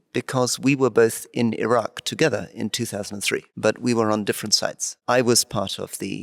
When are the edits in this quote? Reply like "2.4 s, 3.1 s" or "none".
3.5 s, 4.9 s